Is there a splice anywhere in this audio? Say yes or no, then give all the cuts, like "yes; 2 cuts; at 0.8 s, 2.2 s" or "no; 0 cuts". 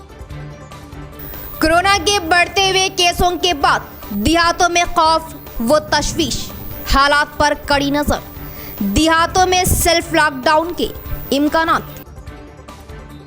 no; 0 cuts